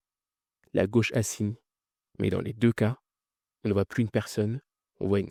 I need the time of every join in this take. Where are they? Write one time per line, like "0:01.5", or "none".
none